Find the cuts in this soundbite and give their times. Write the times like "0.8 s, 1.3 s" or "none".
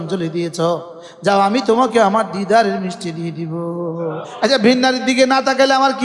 4.3 s

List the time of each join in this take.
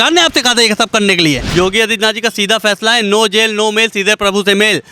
1.4 s

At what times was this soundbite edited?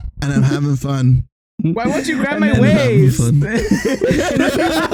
none

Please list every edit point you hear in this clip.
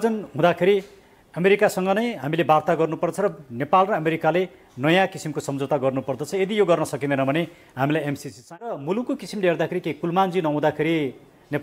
8.8 s

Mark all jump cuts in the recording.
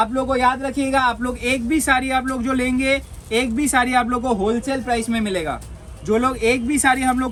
none

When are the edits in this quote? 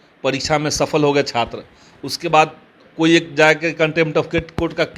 none

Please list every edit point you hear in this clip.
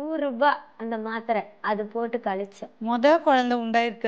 2.6 s

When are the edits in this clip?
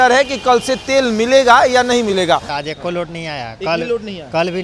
2.5 s

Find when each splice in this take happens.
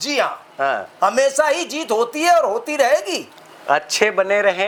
none

